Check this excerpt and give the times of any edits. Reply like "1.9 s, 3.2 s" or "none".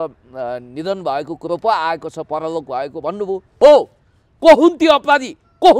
3.6 s

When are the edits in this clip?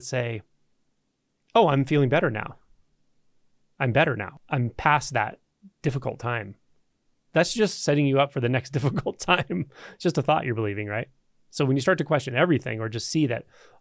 4.4 s

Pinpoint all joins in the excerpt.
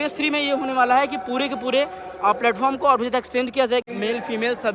3.8 s

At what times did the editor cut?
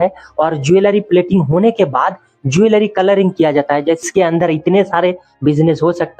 4.0 s

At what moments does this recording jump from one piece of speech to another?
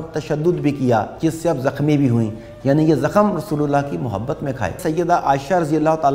4.8 s

